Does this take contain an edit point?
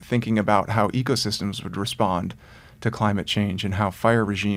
no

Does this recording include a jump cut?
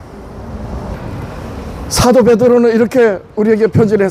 yes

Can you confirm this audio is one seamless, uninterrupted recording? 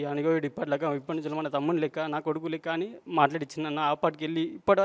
yes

